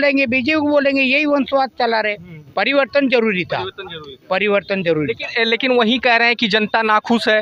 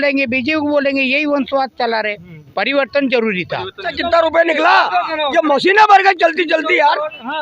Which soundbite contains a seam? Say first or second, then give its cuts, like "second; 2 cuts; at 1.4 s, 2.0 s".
second; 1 cut; at 3.9 s